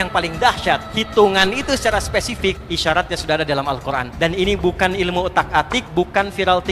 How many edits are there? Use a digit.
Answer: 4